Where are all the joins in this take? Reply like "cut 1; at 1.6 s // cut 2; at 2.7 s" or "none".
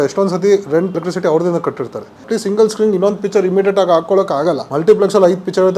cut 1; at 0.9 s // cut 2; at 2.2 s // cut 3; at 4.7 s